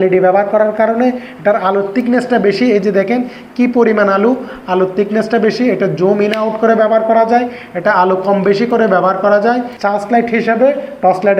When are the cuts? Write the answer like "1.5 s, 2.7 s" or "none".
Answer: 9.8 s